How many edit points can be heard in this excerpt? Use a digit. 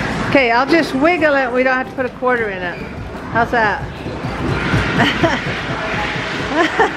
0